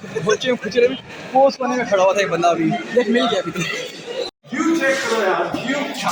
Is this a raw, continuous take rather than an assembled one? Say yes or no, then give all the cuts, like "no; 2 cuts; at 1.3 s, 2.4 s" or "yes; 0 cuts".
yes; 0 cuts